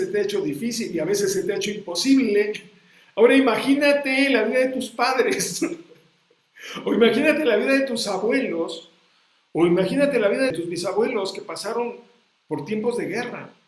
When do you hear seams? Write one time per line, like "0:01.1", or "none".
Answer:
0:10.5